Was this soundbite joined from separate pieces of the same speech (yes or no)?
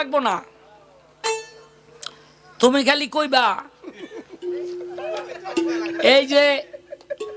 no